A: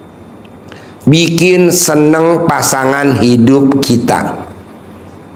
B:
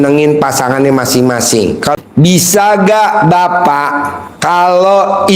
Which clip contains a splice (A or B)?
B